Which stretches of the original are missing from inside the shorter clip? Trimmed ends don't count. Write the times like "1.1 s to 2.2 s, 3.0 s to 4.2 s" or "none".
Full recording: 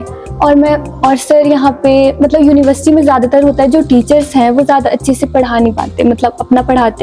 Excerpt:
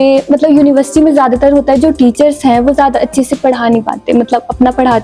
none

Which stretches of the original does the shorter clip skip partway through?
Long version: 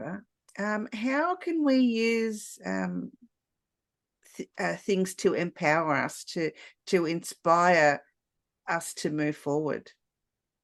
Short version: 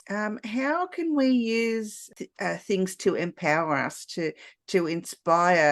2.5 s to 4.2 s

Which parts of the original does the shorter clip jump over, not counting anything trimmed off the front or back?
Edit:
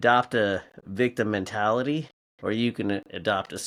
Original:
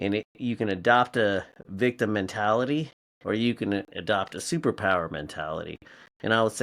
none

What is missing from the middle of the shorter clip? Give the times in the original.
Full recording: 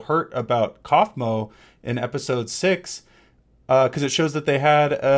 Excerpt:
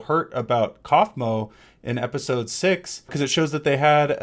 3.1 s to 3.9 s

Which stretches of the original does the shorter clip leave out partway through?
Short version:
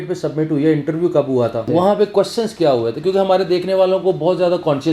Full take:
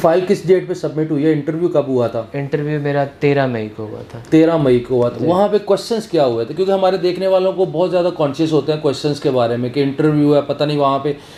2.2 s to 5.2 s

